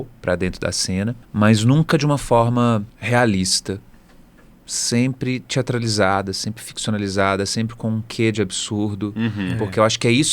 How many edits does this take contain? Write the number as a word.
two